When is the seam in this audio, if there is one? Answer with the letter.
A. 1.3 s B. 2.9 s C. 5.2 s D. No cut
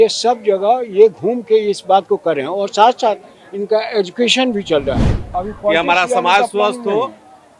C